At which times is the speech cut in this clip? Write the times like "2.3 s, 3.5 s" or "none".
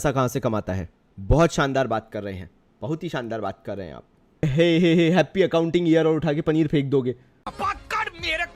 4.5 s